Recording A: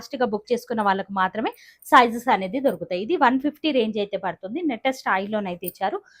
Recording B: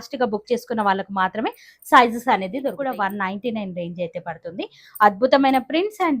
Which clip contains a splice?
B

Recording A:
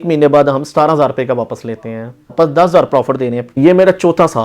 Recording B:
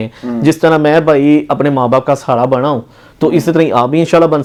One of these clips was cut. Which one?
A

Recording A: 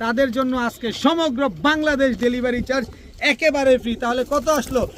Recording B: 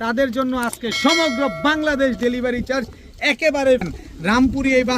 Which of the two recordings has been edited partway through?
B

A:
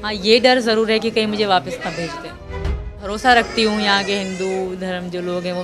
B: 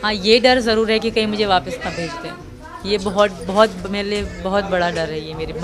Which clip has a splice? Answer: A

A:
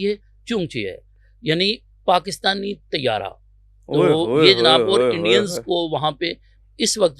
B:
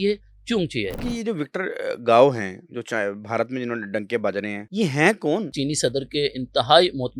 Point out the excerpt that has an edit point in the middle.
B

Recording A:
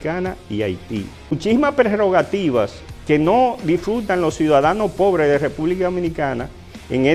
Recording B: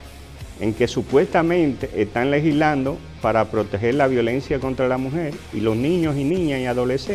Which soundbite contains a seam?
A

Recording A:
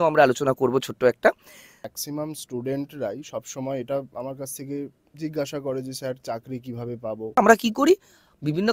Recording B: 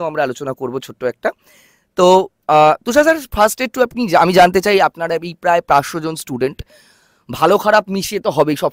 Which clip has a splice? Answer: A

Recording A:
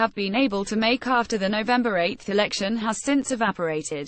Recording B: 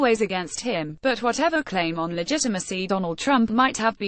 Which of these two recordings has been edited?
A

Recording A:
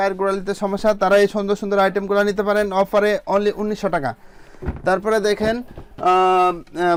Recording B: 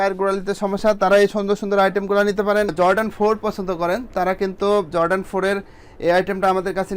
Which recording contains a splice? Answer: B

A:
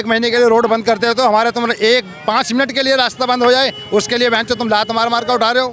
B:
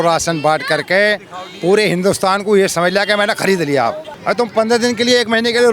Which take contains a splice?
B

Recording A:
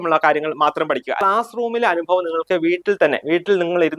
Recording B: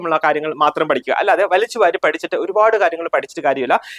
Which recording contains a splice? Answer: A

